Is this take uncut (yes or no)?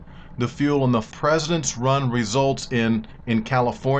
yes